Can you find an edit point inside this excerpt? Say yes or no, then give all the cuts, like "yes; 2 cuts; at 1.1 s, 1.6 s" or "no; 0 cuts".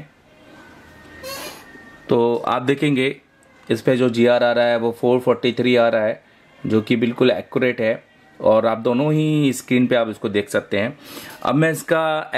no; 0 cuts